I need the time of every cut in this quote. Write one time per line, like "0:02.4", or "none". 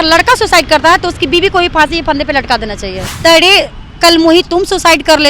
0:03.0